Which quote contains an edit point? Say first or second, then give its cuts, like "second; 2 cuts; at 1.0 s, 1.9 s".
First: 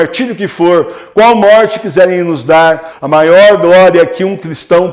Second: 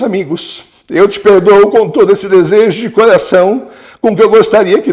first; 1 cut; at 2.9 s